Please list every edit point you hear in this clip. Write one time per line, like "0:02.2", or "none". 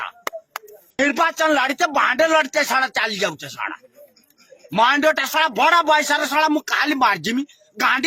0:01.0